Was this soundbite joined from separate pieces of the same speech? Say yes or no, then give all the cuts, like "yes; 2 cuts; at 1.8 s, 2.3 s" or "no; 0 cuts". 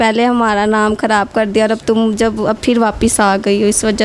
no; 0 cuts